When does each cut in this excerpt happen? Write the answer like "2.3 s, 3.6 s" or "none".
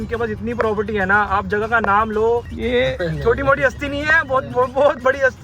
2.5 s